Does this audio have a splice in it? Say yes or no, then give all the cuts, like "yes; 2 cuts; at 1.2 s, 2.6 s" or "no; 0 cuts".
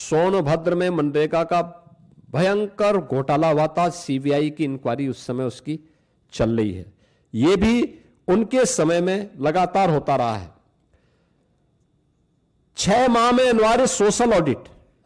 no; 0 cuts